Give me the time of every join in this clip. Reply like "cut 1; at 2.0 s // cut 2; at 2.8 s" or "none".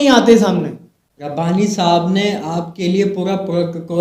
cut 1; at 1.5 s